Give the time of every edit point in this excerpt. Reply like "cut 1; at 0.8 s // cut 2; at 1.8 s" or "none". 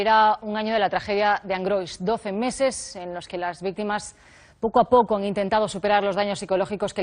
cut 1; at 5.1 s